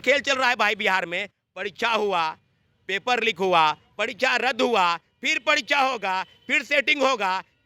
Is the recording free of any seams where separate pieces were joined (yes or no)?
yes